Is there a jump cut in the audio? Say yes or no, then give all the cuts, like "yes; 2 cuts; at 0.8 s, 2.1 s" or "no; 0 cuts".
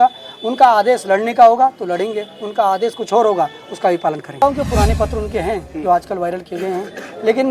yes; 1 cut; at 4.4 s